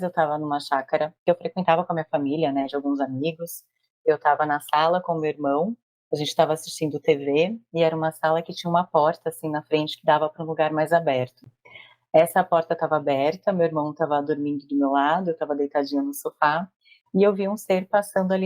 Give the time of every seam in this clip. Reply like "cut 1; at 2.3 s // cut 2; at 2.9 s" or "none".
cut 1; at 1.2 s